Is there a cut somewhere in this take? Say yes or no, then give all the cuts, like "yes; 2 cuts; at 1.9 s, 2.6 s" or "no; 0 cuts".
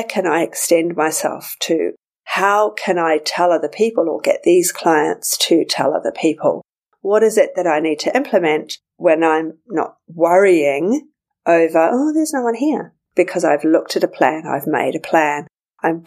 no; 0 cuts